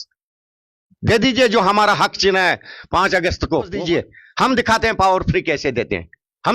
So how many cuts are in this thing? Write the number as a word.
one